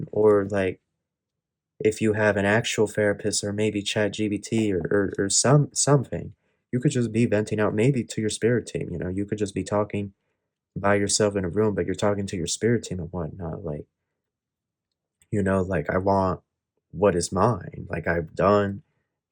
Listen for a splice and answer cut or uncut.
uncut